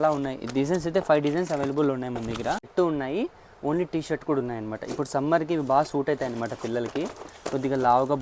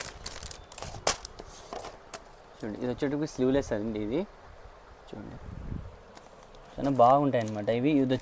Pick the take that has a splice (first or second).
first